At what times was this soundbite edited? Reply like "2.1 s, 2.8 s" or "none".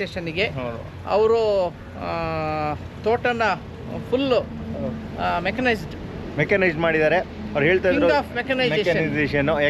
none

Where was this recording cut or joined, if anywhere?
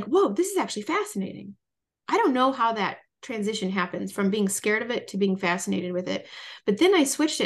none

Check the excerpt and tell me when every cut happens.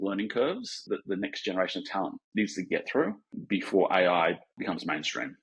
0.8 s, 2.2 s, 3.4 s, 4.6 s

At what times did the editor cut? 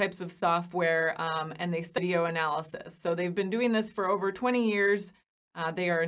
2.0 s

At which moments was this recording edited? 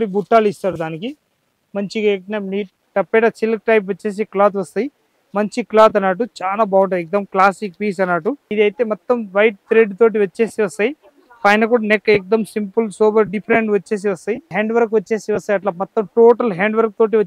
2.8 s, 8.4 s, 14.5 s

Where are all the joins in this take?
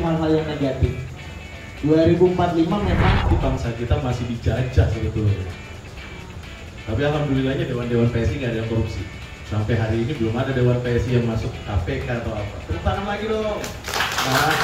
3.2 s

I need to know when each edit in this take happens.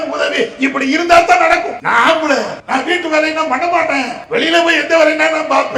1.8 s, 2.6 s, 4.2 s

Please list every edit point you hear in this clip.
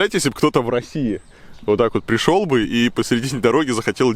none

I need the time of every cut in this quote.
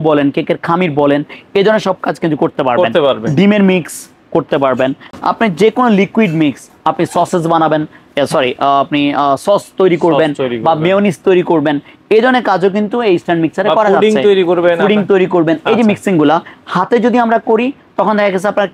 none

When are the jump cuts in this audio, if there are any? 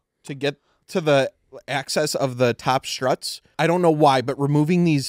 3.4 s

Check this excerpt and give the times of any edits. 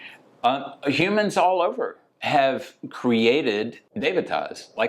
3.8 s

